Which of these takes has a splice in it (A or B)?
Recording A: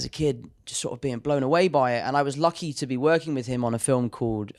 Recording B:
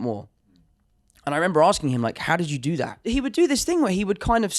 B